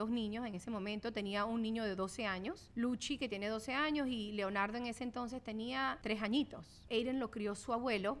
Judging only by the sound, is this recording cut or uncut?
cut